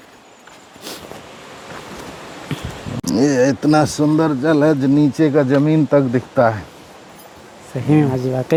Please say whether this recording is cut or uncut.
uncut